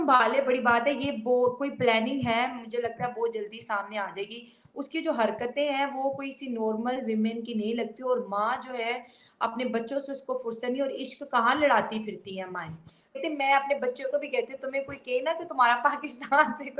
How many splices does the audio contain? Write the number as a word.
one